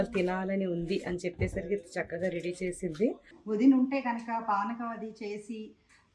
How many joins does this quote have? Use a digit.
1